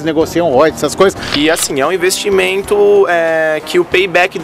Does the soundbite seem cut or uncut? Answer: cut